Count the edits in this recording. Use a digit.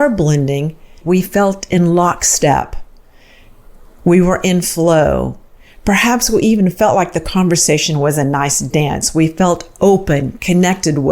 1